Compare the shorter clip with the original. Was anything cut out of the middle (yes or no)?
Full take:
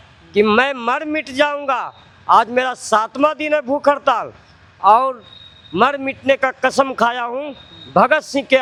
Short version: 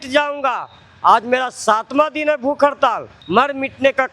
yes